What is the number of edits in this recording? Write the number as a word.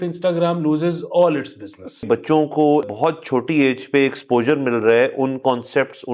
two